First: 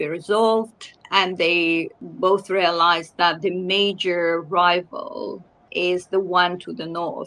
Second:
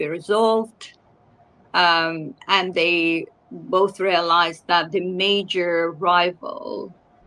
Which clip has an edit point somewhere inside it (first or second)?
first